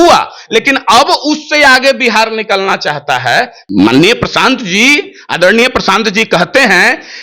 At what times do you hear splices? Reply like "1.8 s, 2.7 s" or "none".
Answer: 3.6 s